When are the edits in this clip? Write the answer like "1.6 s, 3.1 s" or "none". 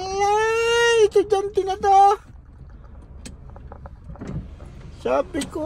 none

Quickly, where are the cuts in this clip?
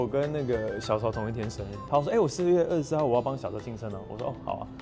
1.7 s

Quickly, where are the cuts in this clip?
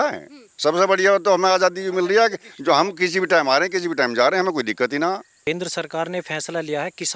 5.3 s

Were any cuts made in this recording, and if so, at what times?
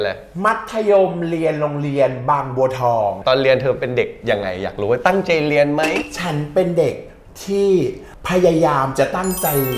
3.2 s, 6.0 s

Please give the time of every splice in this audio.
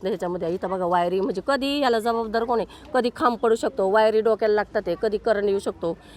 none

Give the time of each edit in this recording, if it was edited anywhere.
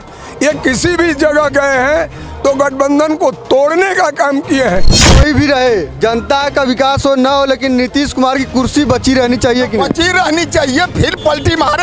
5.1 s

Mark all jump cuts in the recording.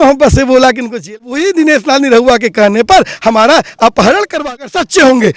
1.2 s, 4.4 s

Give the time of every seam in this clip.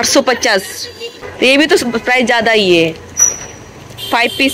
1.3 s

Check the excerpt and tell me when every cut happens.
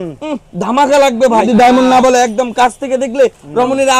1.4 s

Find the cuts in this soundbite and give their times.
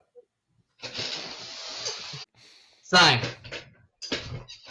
2.2 s

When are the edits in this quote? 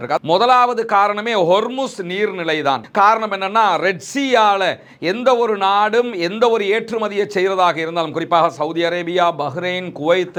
none

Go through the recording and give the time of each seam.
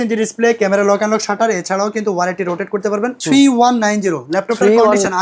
3.2 s

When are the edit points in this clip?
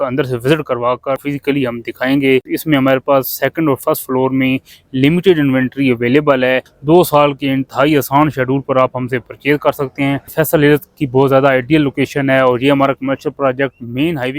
1.2 s, 2.5 s, 6.7 s, 10.3 s

